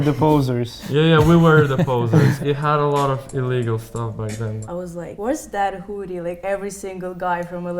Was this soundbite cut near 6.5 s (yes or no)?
no